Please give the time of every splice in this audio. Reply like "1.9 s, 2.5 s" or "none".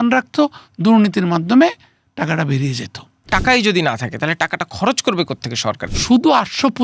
3.3 s, 5.8 s